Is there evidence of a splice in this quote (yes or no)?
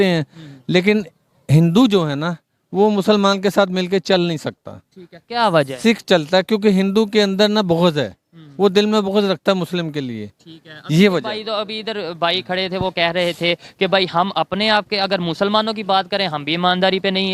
no